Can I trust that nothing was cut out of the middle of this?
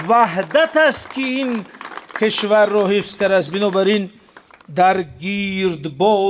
yes; 0 cuts

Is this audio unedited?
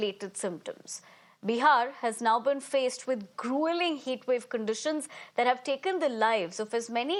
yes; 0 cuts

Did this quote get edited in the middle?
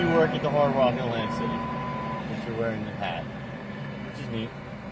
no; 0 cuts

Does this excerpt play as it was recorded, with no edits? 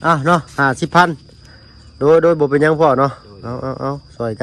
yes; 0 cuts

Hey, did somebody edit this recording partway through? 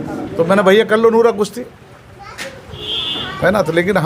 no; 0 cuts

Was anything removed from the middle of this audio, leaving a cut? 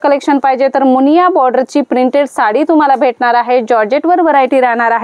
no; 0 cuts

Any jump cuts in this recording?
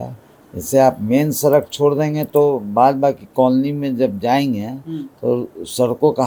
no; 0 cuts

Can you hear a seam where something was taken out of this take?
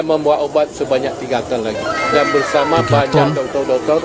no; 0 cuts

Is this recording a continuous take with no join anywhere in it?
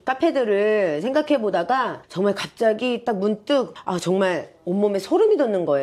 no; 2 cuts; at 2.0 s, 3.8 s

